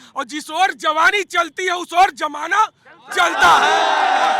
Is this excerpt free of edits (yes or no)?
yes